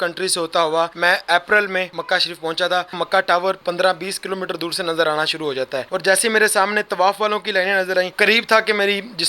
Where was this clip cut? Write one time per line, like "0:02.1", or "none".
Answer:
0:00.9
0:02.0
0:03.1
0:05.9
0:08.1